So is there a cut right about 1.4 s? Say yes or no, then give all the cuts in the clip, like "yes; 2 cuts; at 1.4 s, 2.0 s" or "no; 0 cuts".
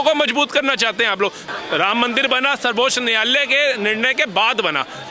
yes; 1 cut; at 1.4 s